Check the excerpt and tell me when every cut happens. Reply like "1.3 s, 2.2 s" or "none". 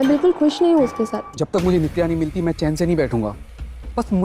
1.3 s

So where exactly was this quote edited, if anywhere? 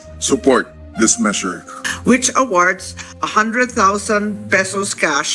1.8 s

